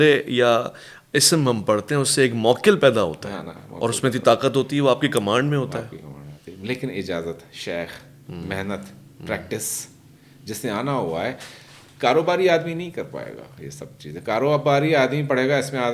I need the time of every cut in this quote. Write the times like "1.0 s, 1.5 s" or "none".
none